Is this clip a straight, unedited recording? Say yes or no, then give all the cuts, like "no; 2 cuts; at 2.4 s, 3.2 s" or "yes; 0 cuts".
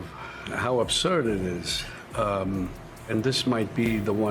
yes; 0 cuts